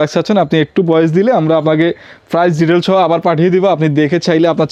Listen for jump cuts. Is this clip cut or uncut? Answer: uncut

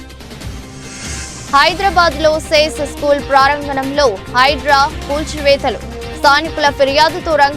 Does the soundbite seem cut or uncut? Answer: cut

